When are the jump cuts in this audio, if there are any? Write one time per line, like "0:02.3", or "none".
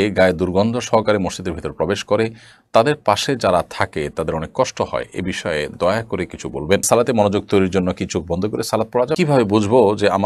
0:06.8
0:09.2